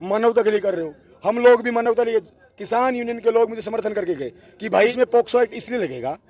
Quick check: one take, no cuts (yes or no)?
no